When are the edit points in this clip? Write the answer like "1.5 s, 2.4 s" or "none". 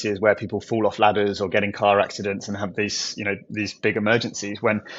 none